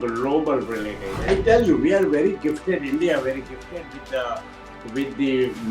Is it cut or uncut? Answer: cut